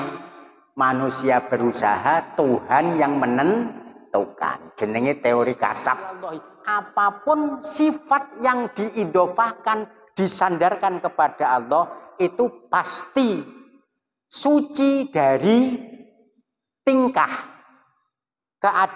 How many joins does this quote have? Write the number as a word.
one